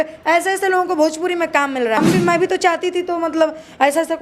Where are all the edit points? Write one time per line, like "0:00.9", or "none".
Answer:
0:02.0

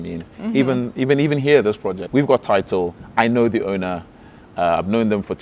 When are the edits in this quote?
0:02.0

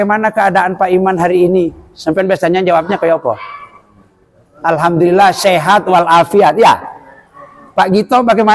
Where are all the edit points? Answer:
none

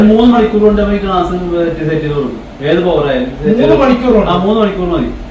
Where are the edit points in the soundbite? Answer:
none

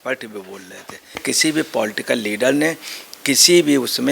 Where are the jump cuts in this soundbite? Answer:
0:01.2

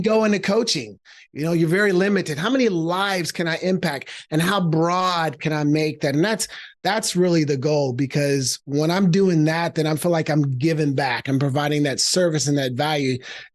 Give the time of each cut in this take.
none

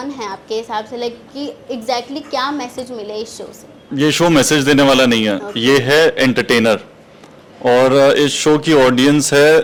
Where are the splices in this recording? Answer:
none

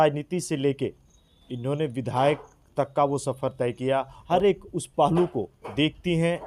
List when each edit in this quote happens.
0:04.2

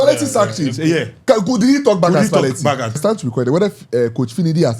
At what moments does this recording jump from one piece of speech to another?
0:03.0

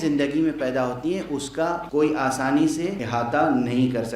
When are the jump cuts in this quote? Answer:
0:01.8
0:03.0

